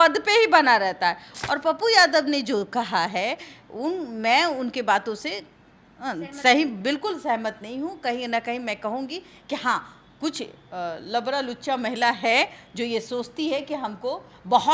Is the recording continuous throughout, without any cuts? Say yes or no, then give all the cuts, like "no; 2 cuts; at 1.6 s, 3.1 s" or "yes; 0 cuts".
no; 1 cut; at 1.3 s